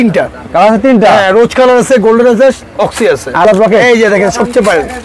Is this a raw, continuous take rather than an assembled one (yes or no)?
no